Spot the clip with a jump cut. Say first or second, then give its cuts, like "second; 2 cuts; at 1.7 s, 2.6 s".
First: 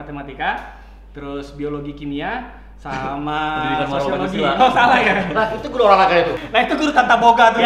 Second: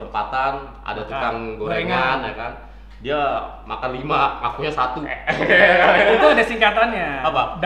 first; 1 cut; at 6.3 s